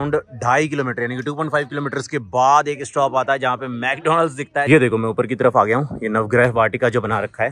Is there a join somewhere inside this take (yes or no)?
yes